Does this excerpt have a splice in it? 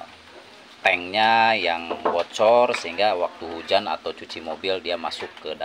no; 0 cuts

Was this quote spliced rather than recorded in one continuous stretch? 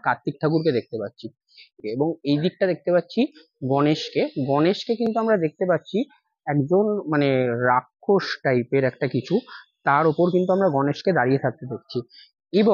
yes; 1 cut; at 1.8 s

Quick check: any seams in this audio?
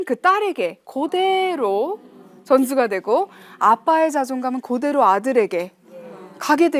no; 0 cuts

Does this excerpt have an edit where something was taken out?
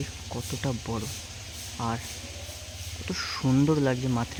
no; 0 cuts

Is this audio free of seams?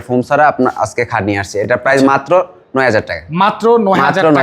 yes; 0 cuts

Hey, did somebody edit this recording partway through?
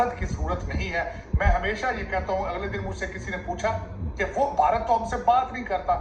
no; 0 cuts

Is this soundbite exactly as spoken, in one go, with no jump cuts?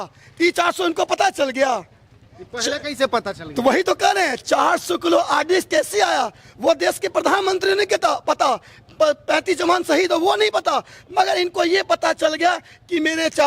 yes; 0 cuts

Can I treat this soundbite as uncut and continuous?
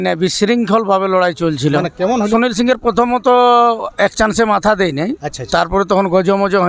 no; 1 cut; at 2.3 s

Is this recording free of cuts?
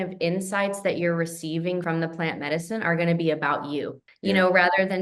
no; 2 cuts; at 1.8 s, 4.0 s

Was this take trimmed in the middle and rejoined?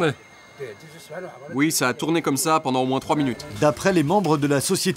yes; 1 cut; at 3.5 s

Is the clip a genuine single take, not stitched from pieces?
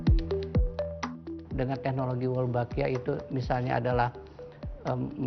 no; 1 cut; at 1.3 s

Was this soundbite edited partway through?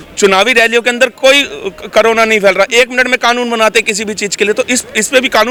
no; 0 cuts

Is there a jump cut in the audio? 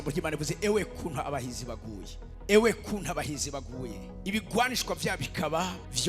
yes; 1 cut; at 4.1 s

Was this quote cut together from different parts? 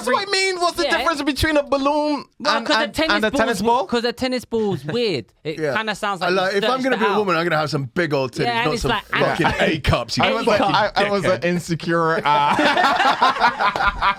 no; 0 cuts

